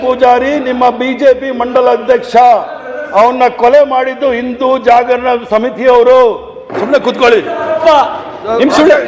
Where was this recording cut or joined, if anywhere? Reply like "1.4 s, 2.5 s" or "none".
none